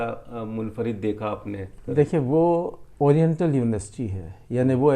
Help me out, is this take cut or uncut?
cut